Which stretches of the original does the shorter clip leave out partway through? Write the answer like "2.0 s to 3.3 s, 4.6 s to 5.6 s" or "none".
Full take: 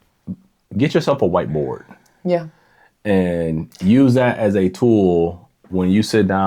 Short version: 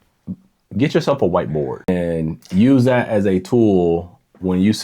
1.9 s to 3.2 s